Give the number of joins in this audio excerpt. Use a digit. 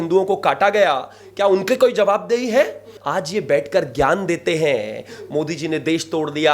1